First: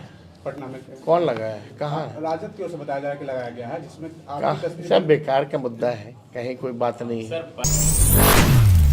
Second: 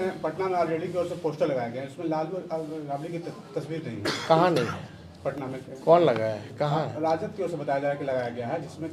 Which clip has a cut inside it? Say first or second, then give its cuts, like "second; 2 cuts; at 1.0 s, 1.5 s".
first; 1 cut; at 7.7 s